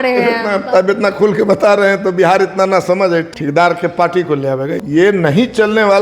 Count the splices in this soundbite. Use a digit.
2